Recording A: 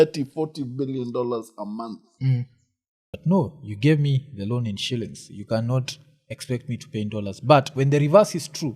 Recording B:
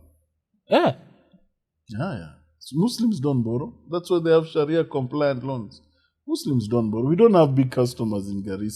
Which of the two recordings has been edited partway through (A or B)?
A